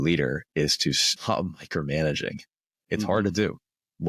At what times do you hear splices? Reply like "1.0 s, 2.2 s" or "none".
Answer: 1.1 s